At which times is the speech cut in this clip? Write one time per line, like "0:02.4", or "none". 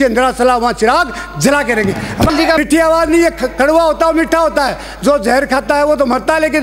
0:02.6